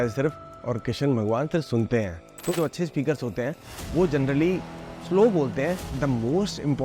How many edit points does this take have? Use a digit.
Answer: 2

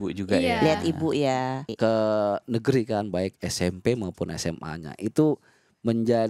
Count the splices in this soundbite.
1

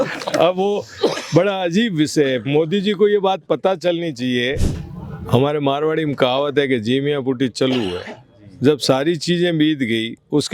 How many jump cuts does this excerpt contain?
1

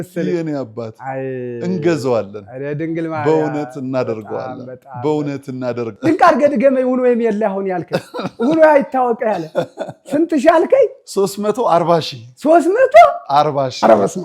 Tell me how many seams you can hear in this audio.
1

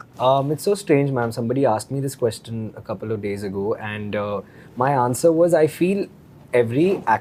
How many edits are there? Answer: 0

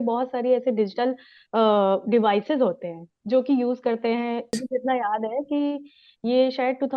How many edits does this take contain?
1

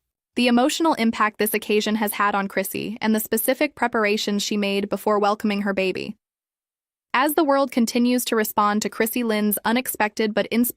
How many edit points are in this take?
2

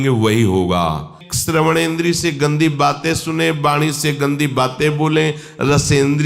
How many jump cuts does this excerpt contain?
1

